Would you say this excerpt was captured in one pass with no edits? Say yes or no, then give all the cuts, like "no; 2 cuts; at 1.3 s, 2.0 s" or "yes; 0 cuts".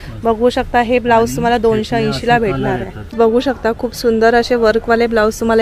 no; 1 cut; at 3.1 s